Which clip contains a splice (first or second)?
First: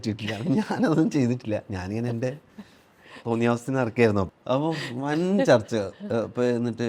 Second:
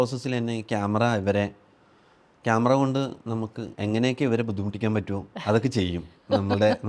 first